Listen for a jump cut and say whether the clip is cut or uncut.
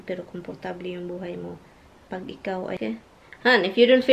cut